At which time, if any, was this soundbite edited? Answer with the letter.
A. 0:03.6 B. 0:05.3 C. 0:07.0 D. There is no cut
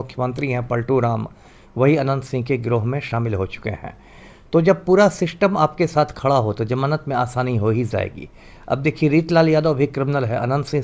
D